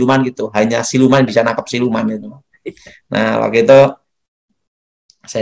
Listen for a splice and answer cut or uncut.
uncut